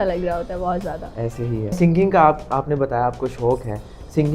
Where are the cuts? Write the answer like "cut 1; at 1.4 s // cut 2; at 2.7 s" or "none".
cut 1; at 1.8 s